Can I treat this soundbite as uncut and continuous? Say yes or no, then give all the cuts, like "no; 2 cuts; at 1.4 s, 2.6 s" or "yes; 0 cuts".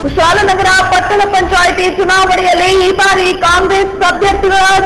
yes; 0 cuts